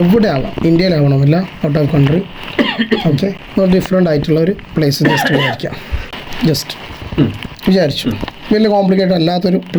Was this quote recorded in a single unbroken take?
yes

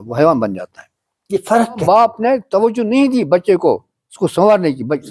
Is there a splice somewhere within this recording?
yes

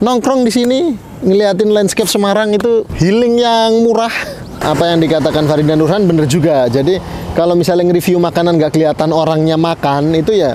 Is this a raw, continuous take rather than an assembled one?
no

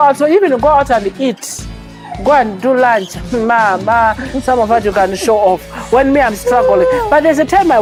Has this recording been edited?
no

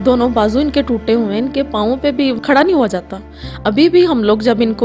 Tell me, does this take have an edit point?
yes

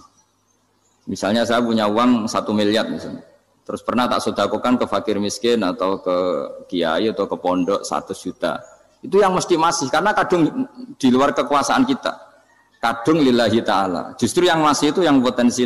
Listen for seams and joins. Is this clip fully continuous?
yes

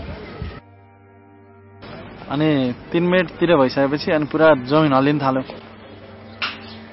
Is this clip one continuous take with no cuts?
no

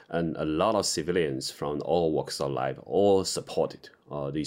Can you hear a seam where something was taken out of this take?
no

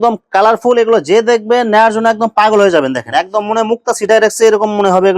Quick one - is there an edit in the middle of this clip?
no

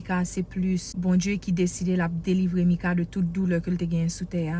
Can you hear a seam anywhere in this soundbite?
yes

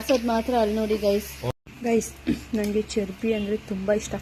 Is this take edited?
yes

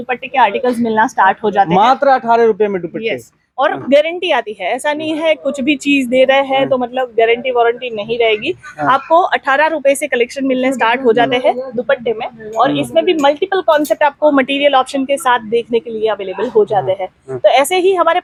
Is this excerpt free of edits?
yes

